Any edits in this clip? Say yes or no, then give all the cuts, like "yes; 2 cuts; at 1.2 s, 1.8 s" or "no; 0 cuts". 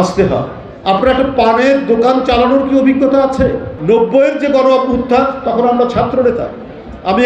yes; 1 cut; at 3.7 s